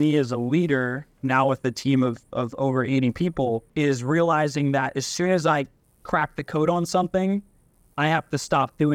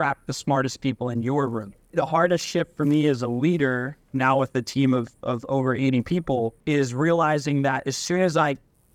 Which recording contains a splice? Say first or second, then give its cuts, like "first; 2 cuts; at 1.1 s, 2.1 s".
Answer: second; 1 cut; at 2.0 s